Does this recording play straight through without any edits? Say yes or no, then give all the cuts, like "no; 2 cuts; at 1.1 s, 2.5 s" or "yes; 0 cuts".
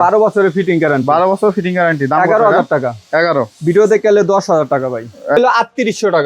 no; 1 cut; at 5.4 s